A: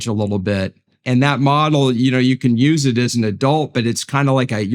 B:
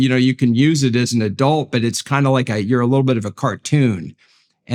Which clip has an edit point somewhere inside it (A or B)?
A